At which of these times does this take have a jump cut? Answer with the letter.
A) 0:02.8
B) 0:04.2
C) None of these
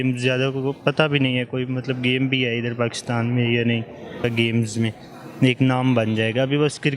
B